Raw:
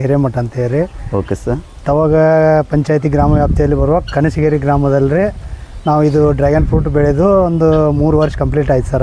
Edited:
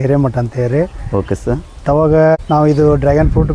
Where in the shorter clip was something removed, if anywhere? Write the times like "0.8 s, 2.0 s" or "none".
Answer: 2.4 s

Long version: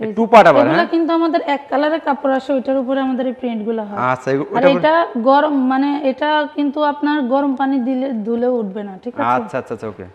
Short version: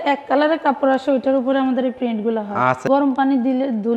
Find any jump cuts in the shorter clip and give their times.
2.8 s

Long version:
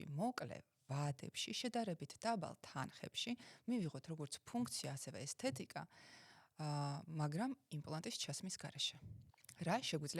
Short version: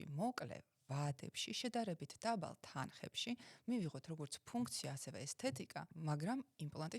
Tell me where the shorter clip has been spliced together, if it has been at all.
5.9 s

